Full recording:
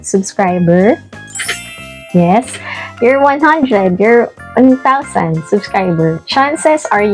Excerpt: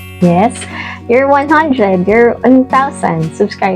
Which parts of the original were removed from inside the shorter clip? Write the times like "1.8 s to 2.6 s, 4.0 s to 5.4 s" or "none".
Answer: 4.3 s to 4.5 s